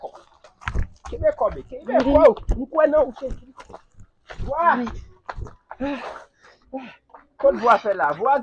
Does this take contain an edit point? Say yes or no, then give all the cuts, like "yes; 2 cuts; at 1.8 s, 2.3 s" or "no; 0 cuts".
no; 0 cuts